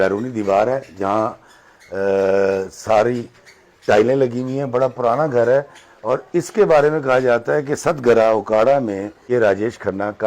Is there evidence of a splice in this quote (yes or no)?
yes